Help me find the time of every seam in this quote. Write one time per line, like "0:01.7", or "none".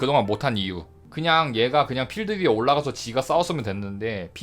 0:01.0